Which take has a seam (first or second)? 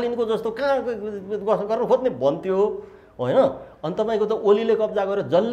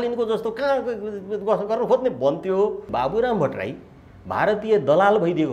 second